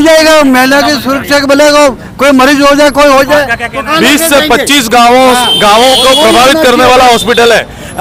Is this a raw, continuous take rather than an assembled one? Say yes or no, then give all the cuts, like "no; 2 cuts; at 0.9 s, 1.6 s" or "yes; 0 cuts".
yes; 0 cuts